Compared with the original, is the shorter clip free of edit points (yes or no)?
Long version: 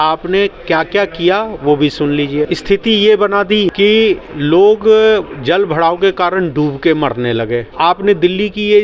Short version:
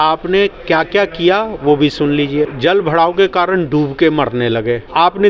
no